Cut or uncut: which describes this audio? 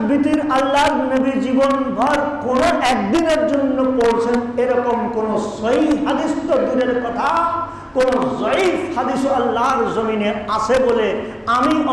uncut